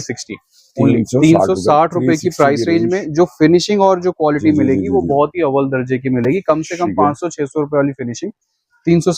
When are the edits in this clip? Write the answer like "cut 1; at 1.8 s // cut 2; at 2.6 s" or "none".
none